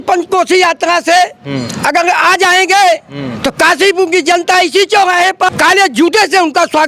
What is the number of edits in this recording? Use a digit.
1